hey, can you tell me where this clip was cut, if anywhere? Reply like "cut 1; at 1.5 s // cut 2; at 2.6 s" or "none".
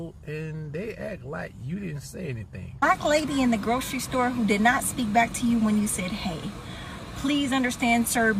cut 1; at 2.6 s